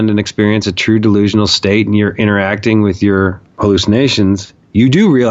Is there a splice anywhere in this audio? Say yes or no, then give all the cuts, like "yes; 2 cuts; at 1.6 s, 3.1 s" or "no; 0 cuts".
yes; 1 cut; at 3.4 s